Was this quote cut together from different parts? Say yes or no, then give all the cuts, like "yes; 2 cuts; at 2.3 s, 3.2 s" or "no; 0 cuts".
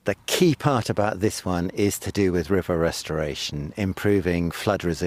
no; 0 cuts